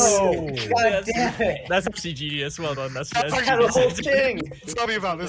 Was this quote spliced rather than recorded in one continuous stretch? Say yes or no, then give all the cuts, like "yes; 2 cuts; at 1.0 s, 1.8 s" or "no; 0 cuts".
no; 0 cuts